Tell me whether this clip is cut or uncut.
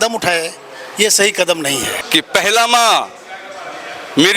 cut